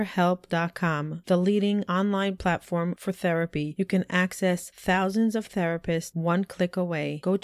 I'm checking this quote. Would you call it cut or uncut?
uncut